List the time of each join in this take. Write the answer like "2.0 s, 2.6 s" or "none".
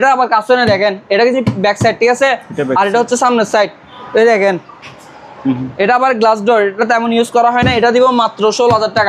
none